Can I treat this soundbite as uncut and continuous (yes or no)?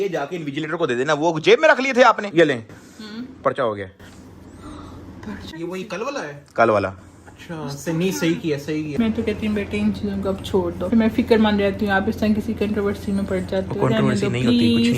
no